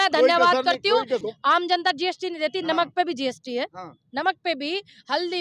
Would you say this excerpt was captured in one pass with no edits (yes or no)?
no